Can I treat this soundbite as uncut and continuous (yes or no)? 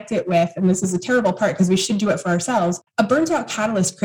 no